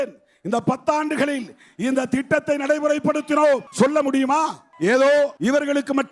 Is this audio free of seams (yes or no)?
no